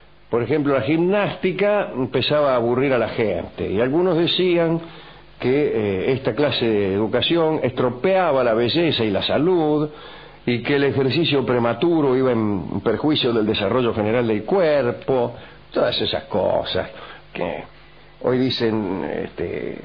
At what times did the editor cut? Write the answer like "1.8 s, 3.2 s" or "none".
none